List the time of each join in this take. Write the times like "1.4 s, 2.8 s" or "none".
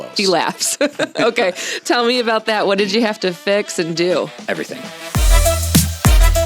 4.9 s